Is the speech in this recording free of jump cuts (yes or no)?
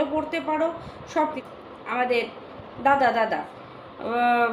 no